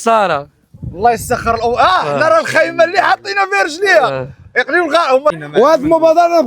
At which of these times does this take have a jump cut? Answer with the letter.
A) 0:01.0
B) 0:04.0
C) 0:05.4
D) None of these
C